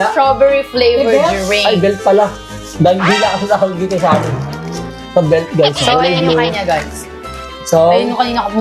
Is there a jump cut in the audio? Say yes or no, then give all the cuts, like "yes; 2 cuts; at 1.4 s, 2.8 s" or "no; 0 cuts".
no; 0 cuts